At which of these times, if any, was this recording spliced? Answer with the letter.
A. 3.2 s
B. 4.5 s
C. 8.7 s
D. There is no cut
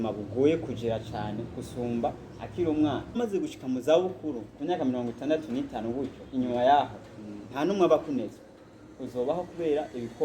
A